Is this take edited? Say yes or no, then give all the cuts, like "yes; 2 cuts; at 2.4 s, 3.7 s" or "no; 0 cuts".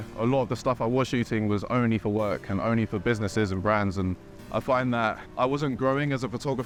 no; 0 cuts